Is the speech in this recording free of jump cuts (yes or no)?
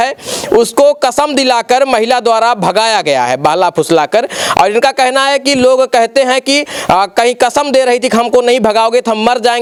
yes